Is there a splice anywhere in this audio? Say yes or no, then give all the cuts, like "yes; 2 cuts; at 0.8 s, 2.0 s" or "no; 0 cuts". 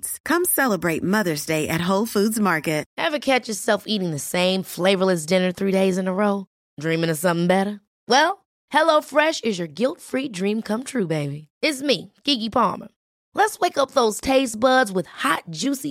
yes; 1 cut; at 2.9 s